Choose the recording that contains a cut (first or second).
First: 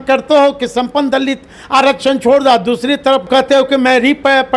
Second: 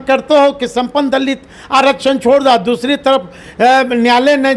first